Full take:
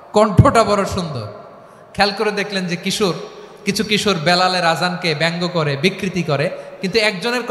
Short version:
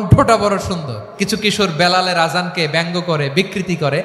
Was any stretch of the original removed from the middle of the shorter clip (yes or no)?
yes